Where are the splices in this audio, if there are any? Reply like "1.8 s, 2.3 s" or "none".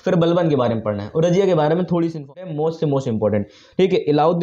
2.4 s